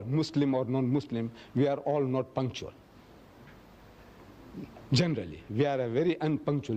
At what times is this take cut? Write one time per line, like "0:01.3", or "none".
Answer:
none